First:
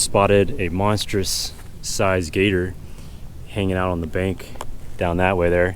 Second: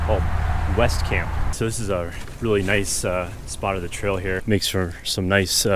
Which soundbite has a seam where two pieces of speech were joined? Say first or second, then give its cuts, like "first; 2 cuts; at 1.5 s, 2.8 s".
second; 2 cuts; at 1.5 s, 4.4 s